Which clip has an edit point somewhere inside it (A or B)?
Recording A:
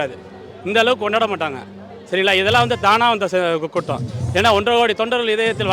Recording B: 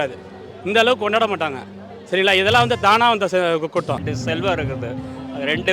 B